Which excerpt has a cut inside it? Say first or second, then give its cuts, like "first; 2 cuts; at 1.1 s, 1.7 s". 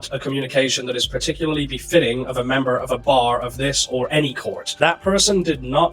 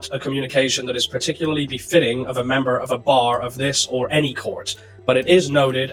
first; 1 cut; at 4.7 s